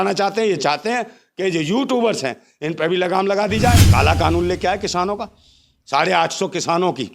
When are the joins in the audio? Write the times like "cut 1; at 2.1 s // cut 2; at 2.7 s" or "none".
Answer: cut 1; at 3.8 s